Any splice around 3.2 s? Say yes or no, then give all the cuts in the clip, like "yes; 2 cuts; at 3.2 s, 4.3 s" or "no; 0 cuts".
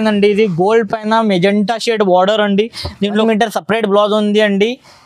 yes; 1 cut; at 3.2 s